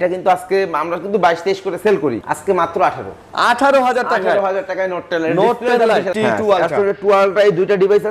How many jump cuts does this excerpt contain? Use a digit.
2